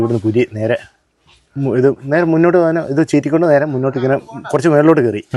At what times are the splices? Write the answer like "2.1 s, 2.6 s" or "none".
none